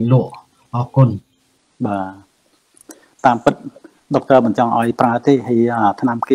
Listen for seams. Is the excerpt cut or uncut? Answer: uncut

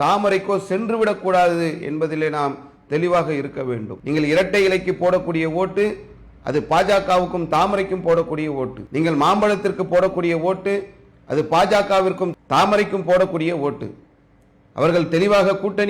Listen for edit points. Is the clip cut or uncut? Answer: cut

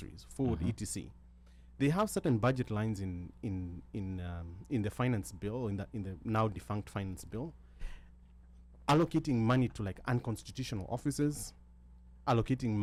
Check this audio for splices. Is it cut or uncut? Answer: uncut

